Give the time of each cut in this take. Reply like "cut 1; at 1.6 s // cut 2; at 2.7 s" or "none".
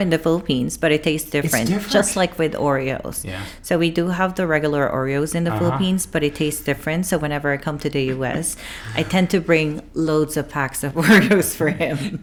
none

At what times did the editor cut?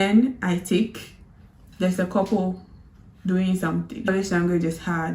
cut 1; at 4.0 s

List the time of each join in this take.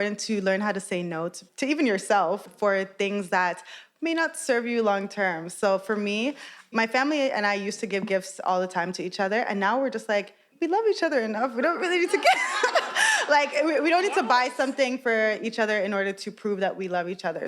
cut 1; at 1.4 s // cut 2; at 10.5 s

